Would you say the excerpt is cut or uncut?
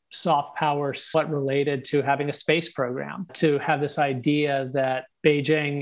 uncut